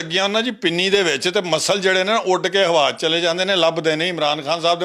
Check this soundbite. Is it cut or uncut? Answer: uncut